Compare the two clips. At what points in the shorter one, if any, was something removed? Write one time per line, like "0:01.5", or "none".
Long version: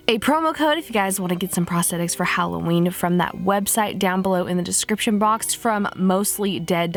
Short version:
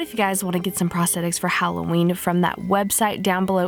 none